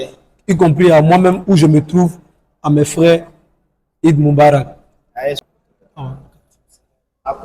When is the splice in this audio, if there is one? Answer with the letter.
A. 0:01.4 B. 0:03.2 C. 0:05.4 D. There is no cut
C